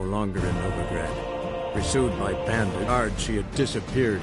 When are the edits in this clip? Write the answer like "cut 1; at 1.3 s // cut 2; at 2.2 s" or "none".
cut 1; at 2.9 s